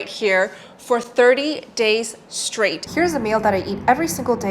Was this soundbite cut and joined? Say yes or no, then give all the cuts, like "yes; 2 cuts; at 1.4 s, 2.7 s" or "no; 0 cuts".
yes; 1 cut; at 2.8 s